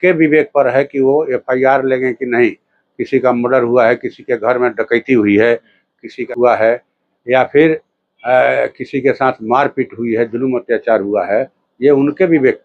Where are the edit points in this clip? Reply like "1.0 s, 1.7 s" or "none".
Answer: 6.3 s